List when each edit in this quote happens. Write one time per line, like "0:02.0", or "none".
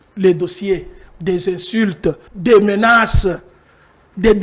0:02.3

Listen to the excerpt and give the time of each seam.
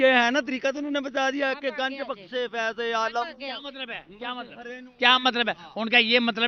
none

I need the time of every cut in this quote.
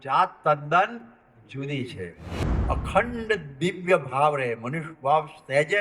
0:02.4

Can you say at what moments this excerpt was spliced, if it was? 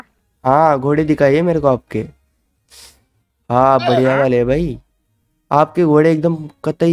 0:05.3

